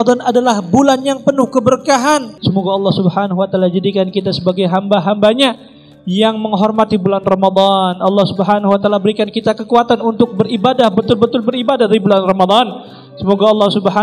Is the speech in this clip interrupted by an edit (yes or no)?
yes